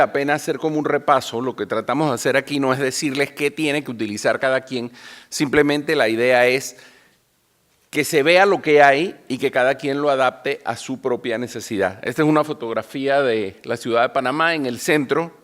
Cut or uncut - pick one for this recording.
cut